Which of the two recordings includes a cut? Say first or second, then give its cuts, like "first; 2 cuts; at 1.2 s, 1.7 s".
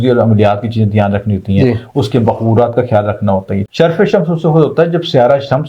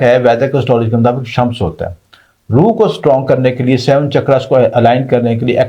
first; 1 cut; at 3.7 s